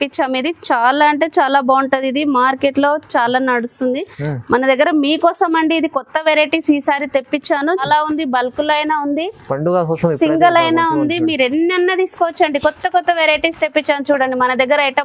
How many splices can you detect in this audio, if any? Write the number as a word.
one